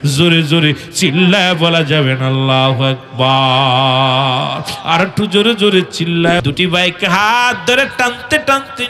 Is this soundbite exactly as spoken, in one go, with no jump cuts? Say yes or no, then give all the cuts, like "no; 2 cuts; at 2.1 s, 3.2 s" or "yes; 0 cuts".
no; 1 cut; at 6.4 s